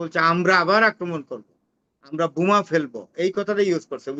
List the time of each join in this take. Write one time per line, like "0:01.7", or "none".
none